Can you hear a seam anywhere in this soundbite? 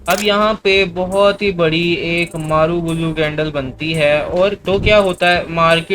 yes; 1 cut; at 4.6 s

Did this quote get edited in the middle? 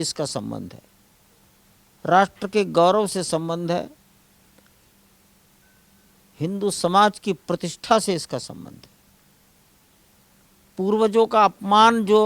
no; 0 cuts

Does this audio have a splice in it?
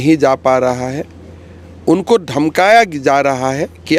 no; 0 cuts

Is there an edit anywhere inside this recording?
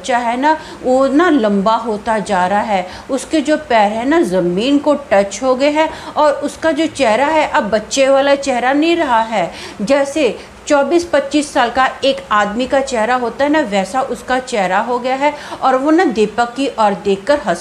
no; 0 cuts

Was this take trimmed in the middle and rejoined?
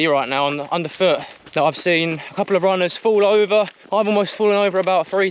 yes; 1 cut; at 3.8 s

